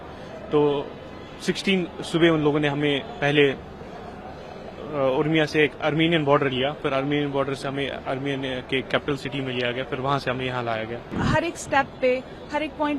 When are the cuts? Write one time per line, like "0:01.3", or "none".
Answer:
0:11.1